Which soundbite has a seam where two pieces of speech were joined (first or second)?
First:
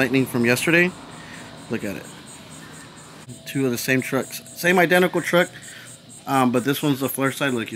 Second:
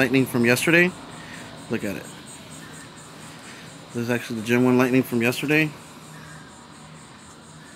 first